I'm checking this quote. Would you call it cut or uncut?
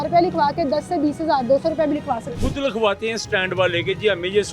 cut